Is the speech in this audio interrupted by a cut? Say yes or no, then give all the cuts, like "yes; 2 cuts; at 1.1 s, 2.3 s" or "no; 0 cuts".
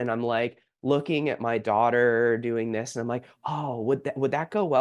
no; 0 cuts